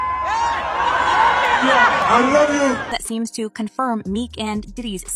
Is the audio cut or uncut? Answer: cut